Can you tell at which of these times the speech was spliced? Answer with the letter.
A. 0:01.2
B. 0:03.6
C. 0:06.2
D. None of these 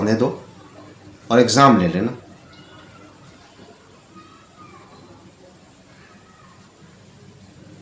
D